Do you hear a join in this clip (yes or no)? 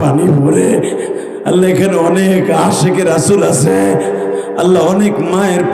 no